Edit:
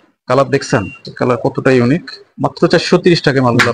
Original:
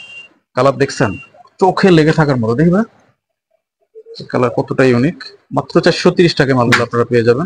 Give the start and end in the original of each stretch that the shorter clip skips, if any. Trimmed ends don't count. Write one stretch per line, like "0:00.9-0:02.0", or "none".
0:01.3-0:04.1